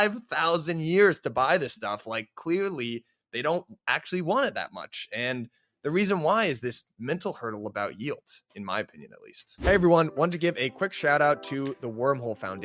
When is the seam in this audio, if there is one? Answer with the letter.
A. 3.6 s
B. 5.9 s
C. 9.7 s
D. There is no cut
C